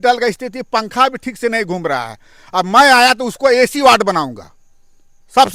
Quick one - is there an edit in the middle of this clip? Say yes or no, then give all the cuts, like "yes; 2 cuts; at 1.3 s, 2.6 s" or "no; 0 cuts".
no; 0 cuts